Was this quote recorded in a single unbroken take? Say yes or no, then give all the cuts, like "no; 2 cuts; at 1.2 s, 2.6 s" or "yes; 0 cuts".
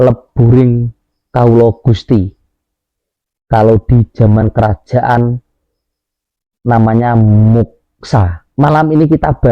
no; 1 cut; at 8.4 s